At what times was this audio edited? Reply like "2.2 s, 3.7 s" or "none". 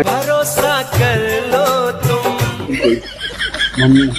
2.7 s